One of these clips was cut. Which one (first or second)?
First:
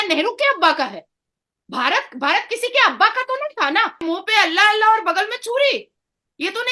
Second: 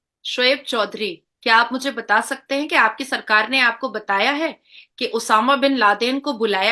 first